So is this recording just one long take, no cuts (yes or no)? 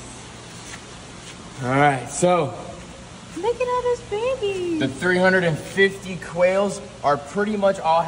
yes